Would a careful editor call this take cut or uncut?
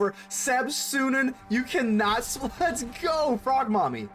uncut